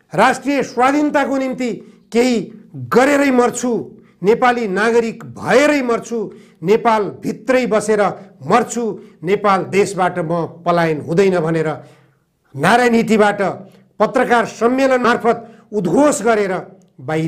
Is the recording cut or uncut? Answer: cut